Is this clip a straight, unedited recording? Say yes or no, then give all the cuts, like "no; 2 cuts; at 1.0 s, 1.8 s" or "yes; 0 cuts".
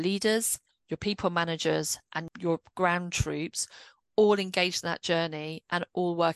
no; 1 cut; at 2.3 s